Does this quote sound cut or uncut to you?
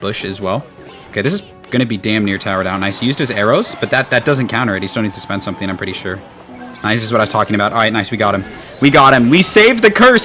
cut